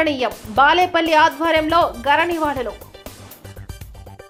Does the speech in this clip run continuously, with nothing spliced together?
yes; 0 cuts

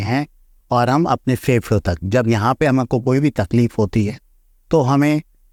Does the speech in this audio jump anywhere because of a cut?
no; 0 cuts

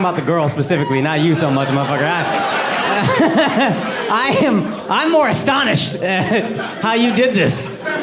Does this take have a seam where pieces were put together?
no; 0 cuts

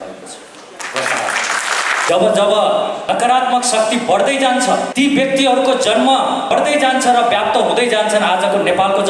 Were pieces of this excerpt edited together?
yes; 4 cuts; at 2.1 s, 3.0 s, 4.9 s, 6.5 s

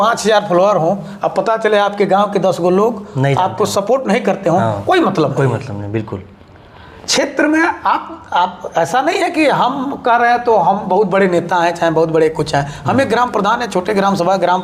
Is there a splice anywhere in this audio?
no; 0 cuts

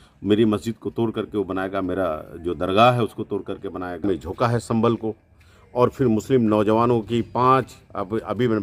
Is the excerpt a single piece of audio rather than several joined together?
no; 1 cut; at 4.0 s

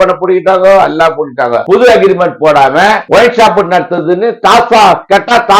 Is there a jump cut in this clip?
yes; 1 cut; at 1.6 s

